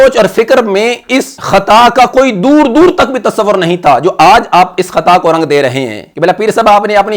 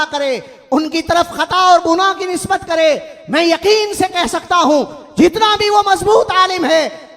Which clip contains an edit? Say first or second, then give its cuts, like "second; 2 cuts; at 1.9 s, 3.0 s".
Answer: first; 2 cuts; at 1.3 s, 6.1 s